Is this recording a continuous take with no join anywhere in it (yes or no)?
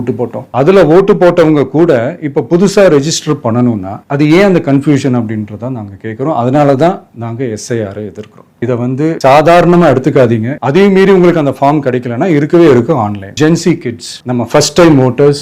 no